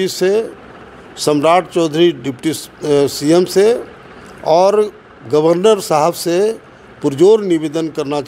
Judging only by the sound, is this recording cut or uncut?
uncut